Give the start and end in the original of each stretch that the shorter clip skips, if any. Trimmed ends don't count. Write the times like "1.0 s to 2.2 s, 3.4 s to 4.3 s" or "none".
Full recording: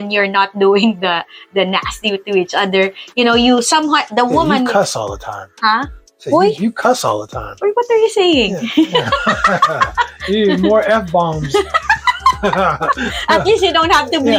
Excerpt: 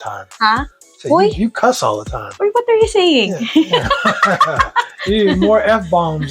none